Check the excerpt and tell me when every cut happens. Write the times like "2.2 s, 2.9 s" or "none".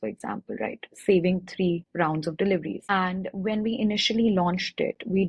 1.9 s, 2.8 s